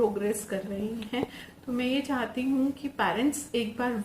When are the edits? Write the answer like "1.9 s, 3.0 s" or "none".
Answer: 1.4 s